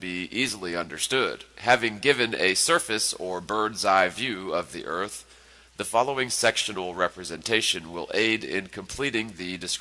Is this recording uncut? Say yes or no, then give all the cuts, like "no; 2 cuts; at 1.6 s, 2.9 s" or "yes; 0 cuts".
no; 1 cut; at 2.6 s